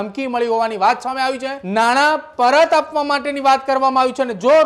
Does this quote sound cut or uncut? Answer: cut